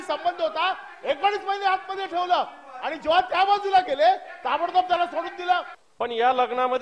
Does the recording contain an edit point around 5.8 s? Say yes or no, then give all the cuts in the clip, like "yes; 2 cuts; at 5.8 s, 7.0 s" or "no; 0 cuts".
yes; 1 cut; at 5.8 s